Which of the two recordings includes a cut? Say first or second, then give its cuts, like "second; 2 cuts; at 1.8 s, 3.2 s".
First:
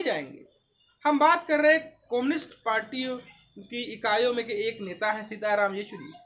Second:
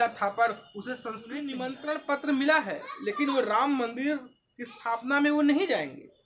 second; 1 cut; at 1.5 s